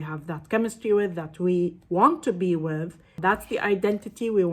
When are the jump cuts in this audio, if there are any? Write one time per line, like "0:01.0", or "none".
0:03.2